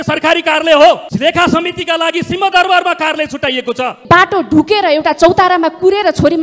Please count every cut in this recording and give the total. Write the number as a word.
two